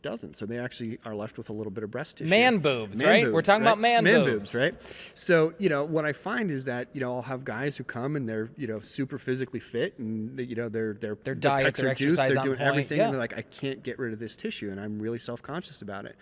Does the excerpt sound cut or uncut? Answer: uncut